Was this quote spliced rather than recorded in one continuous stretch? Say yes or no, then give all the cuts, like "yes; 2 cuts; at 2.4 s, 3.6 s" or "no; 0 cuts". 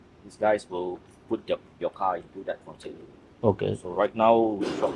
no; 0 cuts